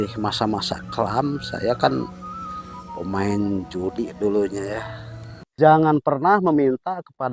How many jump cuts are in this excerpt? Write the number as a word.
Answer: one